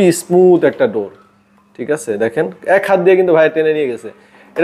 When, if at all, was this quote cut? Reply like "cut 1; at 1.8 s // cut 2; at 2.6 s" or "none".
none